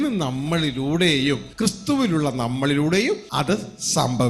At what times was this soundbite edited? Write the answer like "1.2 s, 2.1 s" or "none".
1.5 s, 3.3 s